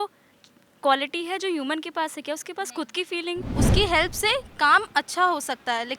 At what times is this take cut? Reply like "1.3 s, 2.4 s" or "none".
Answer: 3.5 s